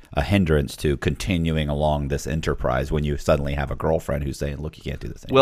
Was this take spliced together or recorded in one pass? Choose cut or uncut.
uncut